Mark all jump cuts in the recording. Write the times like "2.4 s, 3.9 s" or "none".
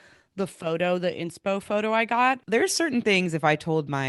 2.4 s